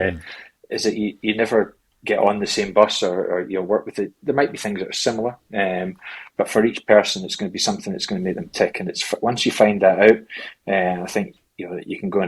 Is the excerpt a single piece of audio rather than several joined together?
yes; 0 cuts

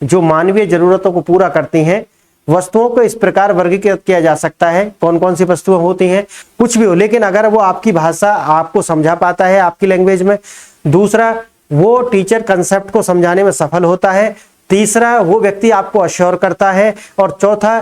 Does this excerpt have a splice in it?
yes; 1 cut; at 6.4 s

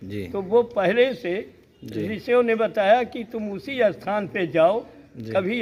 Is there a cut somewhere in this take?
no; 0 cuts

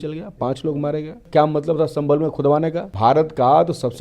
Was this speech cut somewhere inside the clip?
yes; 2 cuts; at 1.2 s, 2.9 s

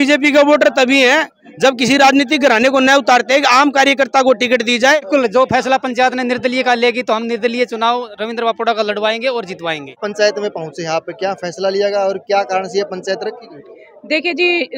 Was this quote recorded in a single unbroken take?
no; 2 cuts; at 5.0 s, 9.9 s

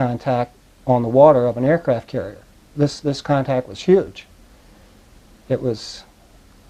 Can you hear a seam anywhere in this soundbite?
no; 0 cuts

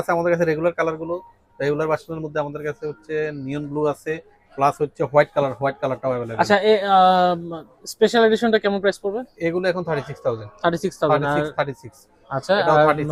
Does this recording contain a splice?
no; 0 cuts

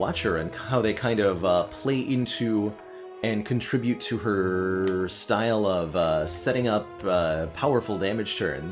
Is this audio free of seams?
yes; 0 cuts

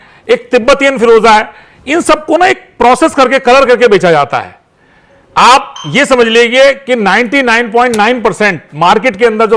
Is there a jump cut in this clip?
no; 0 cuts

